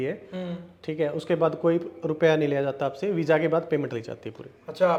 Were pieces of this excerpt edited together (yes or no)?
no